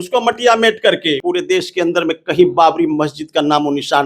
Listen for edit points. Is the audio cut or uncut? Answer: cut